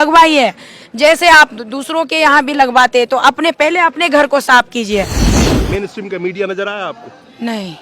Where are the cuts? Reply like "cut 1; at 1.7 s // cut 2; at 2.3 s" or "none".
cut 1; at 5.4 s